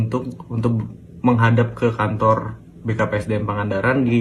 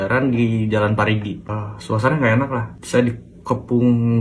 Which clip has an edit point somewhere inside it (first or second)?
second